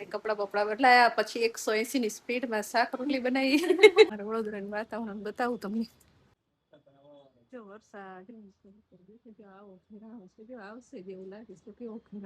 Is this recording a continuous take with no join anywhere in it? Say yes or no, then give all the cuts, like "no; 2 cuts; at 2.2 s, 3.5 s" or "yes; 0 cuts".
no; 1 cut; at 4.2 s